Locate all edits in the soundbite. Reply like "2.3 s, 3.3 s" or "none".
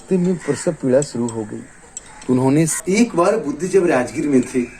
2.7 s